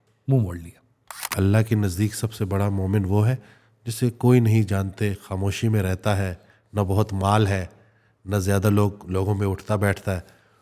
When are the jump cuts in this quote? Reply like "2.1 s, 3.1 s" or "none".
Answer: 1.3 s